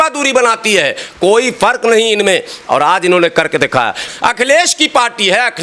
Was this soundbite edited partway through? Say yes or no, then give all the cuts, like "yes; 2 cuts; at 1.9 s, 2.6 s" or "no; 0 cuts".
yes; 1 cut; at 4.1 s